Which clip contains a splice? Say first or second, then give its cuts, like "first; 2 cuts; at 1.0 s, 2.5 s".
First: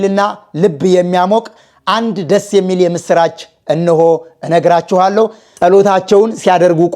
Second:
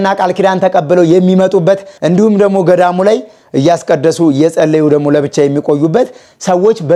first; 1 cut; at 5.4 s